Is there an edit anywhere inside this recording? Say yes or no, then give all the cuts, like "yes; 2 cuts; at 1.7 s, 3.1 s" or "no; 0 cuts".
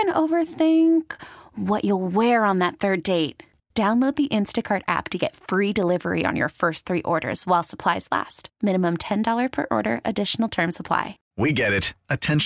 yes; 1 cut; at 11.2 s